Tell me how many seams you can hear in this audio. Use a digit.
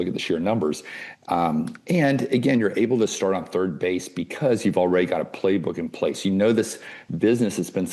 0